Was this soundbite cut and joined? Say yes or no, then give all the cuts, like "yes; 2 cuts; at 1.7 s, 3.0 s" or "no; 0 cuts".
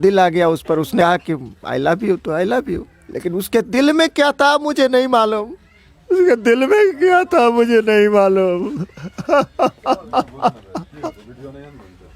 yes; 1 cut; at 1.0 s